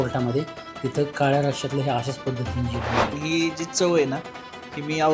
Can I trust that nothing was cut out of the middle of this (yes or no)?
no